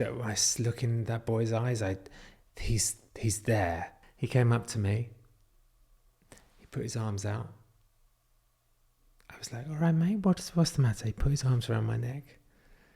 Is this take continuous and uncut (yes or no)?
no